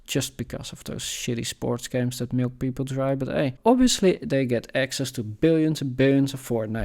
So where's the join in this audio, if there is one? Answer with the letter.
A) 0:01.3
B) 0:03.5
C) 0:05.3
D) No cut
B